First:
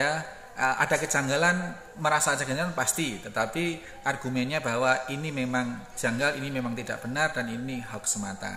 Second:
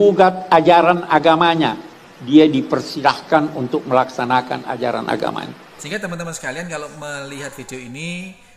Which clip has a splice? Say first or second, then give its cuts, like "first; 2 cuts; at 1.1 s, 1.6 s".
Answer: second; 1 cut; at 5.7 s